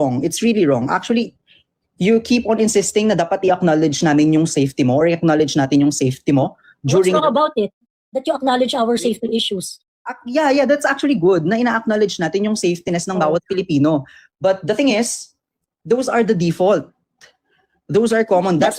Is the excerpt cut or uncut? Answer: uncut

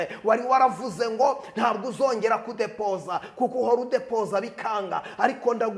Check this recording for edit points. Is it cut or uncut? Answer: uncut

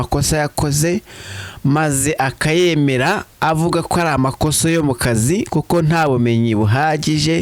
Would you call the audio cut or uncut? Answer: uncut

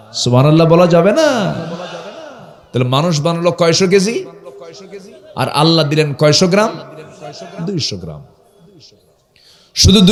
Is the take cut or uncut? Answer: uncut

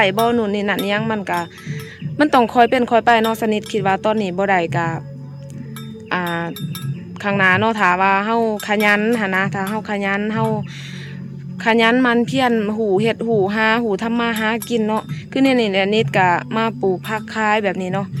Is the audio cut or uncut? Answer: uncut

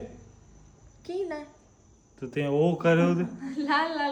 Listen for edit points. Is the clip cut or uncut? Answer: uncut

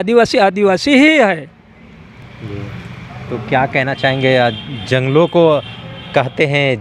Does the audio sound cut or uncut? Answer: uncut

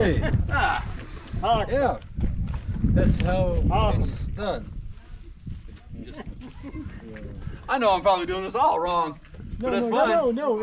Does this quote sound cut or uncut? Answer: uncut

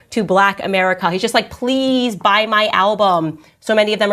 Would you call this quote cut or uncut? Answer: uncut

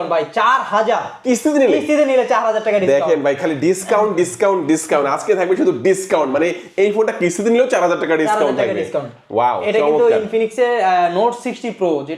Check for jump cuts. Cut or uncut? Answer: uncut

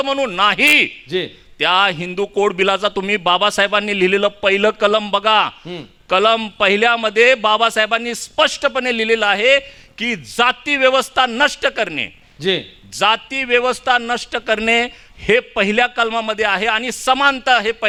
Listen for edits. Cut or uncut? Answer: uncut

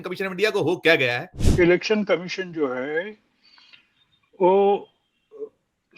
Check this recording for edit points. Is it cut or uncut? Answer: cut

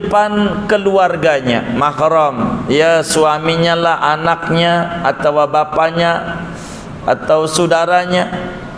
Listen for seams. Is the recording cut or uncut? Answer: uncut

